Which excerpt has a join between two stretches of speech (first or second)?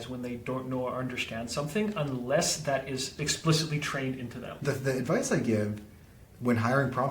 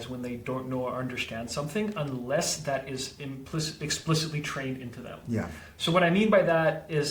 first